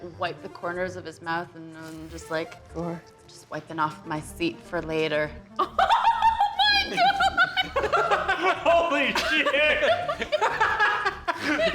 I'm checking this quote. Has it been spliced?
no; 0 cuts

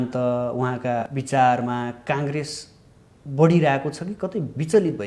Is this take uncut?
no; 1 cut; at 1.1 s

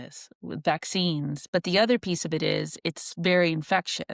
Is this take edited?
yes; 1 cut; at 1.4 s

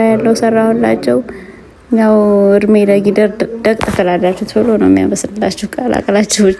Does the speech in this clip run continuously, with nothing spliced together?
yes; 0 cuts

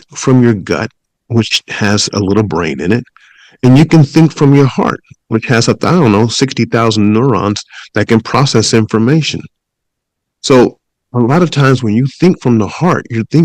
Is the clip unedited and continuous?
yes; 0 cuts

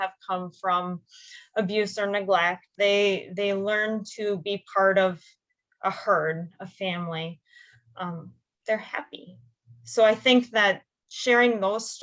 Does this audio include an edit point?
yes; 1 cut; at 2.6 s

